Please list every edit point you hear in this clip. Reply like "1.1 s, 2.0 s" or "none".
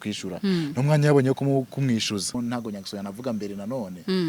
2.3 s